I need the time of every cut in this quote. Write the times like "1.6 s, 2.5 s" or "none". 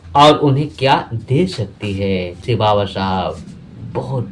2.4 s